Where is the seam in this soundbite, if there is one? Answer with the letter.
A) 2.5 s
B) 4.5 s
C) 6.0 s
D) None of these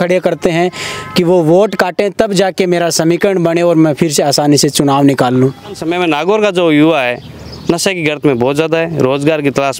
C